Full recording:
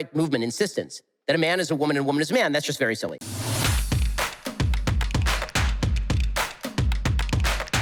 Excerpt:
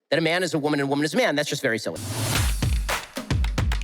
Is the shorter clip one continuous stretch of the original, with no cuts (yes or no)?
no